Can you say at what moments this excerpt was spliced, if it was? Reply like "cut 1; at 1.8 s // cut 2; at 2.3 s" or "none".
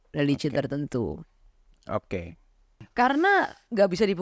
cut 1; at 2.8 s